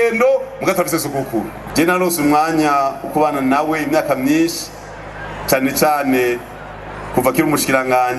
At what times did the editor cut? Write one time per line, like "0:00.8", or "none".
0:01.6